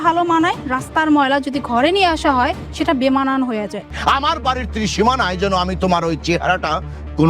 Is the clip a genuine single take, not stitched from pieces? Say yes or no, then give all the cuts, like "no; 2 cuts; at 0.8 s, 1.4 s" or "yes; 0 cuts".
no; 1 cut; at 3.9 s